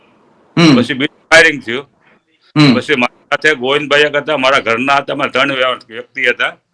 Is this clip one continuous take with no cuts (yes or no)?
yes